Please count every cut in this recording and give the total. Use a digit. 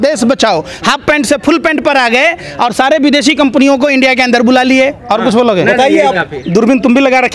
1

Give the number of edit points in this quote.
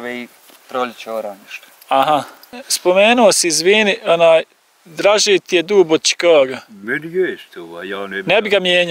1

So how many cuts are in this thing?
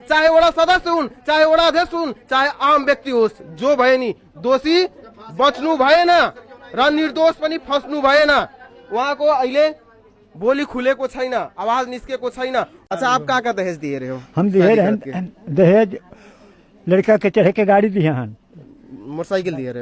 1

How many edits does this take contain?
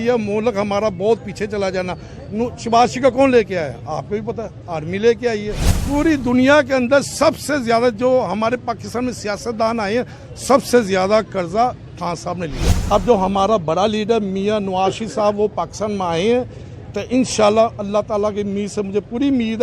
2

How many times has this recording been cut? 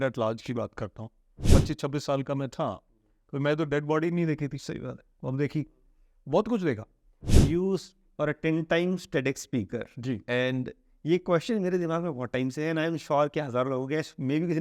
2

